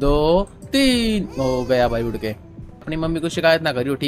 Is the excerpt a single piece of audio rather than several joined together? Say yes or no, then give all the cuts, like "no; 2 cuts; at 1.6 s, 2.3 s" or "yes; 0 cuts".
no; 1 cut; at 2.9 s